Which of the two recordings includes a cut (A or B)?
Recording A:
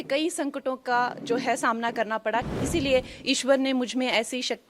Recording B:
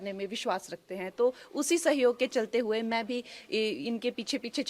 A